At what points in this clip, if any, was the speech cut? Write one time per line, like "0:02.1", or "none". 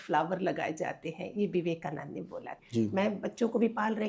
0:02.6